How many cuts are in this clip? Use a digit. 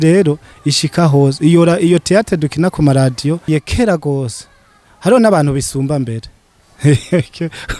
1